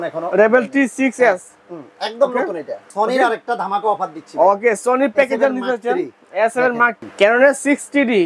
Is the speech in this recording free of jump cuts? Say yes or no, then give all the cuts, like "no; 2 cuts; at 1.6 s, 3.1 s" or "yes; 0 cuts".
no; 2 cuts; at 2.8 s, 7.0 s